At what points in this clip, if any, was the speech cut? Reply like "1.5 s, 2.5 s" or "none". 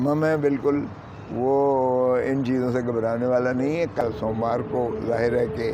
4.0 s